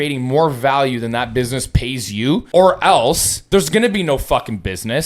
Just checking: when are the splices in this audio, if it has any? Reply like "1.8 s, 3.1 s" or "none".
2.5 s, 3.3 s